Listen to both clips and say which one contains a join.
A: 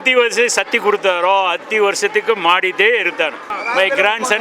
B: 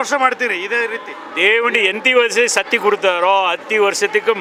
A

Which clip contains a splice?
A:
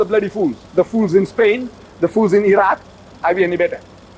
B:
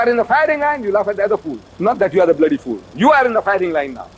A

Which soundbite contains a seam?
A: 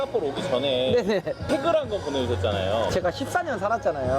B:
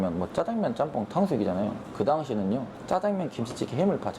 A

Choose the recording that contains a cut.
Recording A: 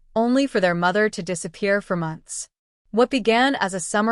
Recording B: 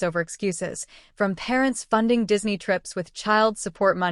B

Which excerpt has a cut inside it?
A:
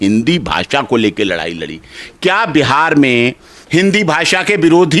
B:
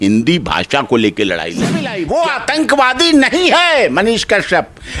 B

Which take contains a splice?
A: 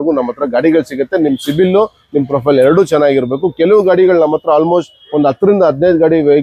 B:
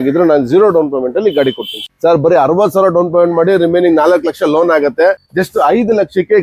B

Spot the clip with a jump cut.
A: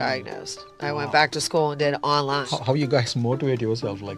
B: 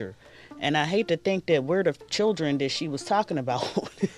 A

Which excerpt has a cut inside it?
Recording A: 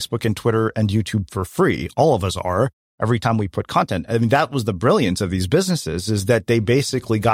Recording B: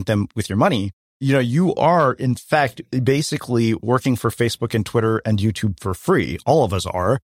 B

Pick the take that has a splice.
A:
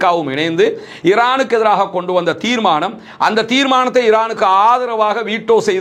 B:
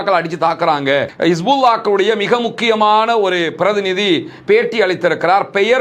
B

